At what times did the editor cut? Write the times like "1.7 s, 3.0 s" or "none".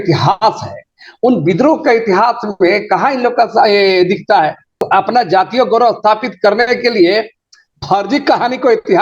4.8 s